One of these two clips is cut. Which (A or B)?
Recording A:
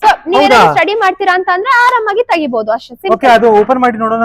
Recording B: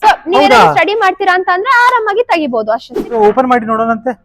B